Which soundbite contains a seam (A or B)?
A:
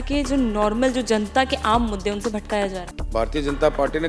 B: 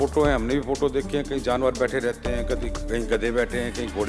A